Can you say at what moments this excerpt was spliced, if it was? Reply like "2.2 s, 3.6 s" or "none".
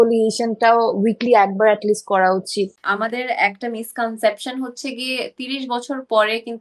2.8 s